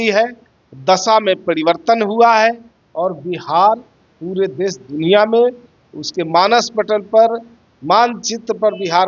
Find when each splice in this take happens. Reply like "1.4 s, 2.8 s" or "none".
none